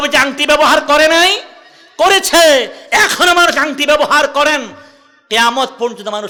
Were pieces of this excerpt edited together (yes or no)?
no